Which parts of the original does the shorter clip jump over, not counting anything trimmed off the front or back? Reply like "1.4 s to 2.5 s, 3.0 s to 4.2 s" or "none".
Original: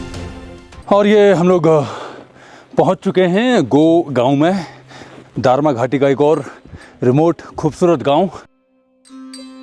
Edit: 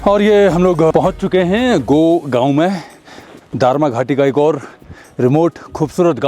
1.8 s to 2.7 s